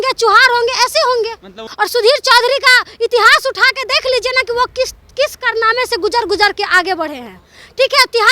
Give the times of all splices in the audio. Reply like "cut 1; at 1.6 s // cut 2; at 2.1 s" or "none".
cut 1; at 1.6 s